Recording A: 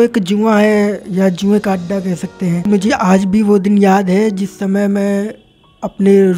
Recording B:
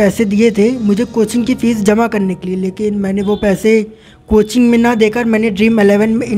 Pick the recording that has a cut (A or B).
A